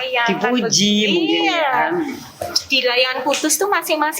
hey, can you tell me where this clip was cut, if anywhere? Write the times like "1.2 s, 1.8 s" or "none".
2.4 s